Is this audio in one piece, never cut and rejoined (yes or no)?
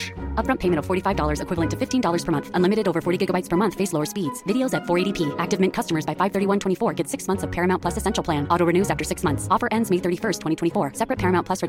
yes